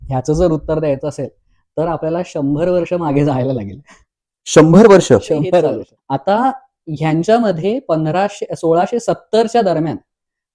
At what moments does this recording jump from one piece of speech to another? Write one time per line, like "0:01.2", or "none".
0:05.6